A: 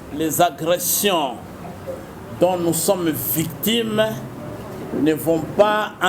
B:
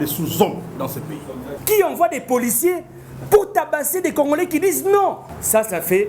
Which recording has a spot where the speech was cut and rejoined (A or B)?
B